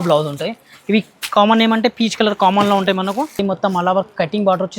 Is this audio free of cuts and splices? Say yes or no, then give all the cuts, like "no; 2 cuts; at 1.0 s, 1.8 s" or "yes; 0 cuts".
no; 1 cut; at 3.4 s